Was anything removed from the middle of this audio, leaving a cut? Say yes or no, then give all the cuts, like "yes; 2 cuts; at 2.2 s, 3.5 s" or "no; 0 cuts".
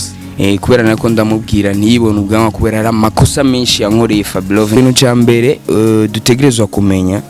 yes; 1 cut; at 4.8 s